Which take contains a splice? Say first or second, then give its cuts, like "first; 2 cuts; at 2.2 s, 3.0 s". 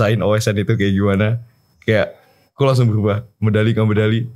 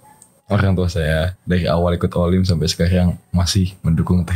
second; 1 cut; at 1.3 s